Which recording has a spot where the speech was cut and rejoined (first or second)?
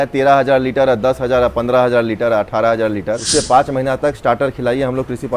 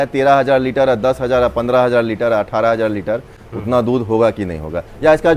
first